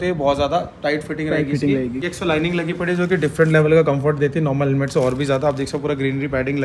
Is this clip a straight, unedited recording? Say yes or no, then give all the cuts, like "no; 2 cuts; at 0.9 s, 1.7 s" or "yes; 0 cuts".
yes; 0 cuts